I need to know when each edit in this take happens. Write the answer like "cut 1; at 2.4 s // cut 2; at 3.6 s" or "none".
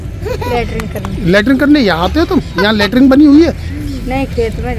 none